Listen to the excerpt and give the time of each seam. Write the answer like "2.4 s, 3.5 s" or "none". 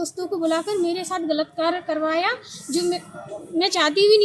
none